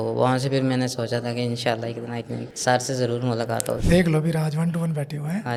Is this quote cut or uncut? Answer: uncut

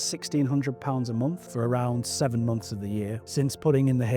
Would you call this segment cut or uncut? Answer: cut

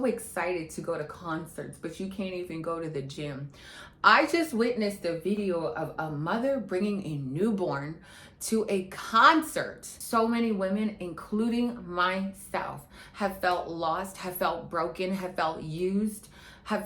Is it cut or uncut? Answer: cut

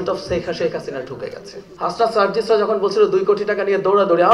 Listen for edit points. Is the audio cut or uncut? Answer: cut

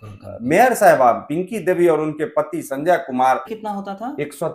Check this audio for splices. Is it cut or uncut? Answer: cut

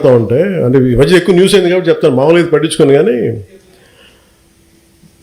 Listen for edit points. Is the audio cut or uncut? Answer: cut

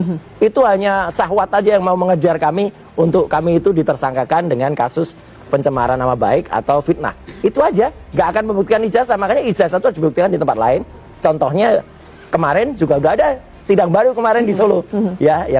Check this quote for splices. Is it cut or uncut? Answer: uncut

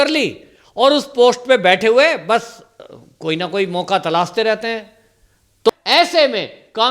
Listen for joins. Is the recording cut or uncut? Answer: cut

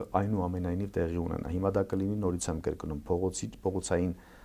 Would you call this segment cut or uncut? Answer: uncut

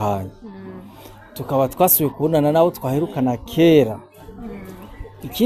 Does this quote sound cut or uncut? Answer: uncut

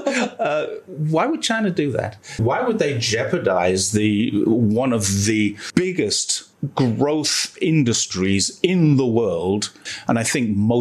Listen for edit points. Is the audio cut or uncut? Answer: cut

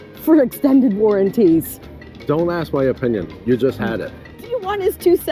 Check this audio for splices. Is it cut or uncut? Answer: cut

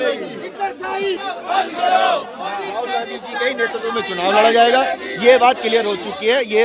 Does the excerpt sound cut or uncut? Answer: uncut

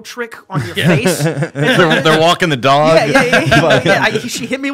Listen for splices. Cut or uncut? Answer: uncut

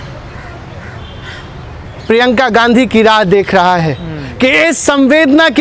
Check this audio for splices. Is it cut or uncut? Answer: uncut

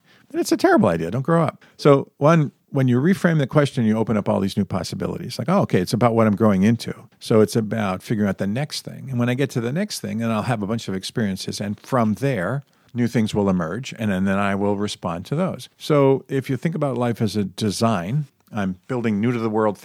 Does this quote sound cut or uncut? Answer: cut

